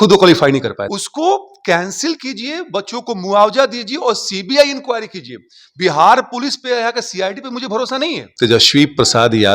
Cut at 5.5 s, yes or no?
no